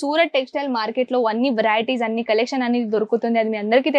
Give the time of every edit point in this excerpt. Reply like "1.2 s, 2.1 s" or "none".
none